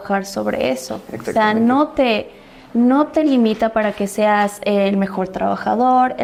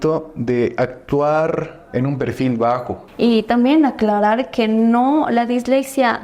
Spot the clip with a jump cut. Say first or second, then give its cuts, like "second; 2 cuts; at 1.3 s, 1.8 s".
second; 1 cut; at 3.0 s